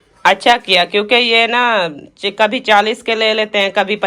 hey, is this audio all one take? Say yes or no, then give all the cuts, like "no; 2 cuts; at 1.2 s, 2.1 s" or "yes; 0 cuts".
yes; 0 cuts